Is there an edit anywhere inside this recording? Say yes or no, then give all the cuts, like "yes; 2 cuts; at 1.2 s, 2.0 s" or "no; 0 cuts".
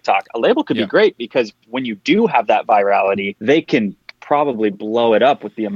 yes; 1 cut; at 3.3 s